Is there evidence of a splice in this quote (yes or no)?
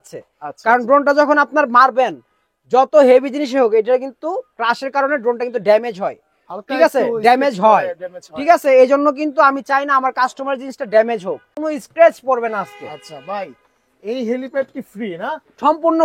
yes